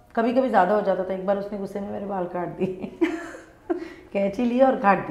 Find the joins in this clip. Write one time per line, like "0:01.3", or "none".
none